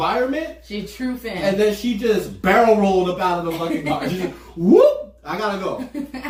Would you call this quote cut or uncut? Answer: uncut